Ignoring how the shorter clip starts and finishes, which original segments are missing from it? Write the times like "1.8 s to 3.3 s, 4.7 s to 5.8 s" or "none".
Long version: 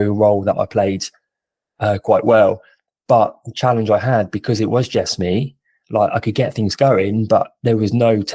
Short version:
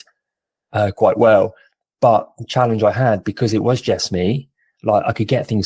none